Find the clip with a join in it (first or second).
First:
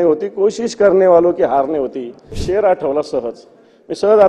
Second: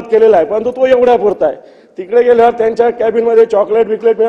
first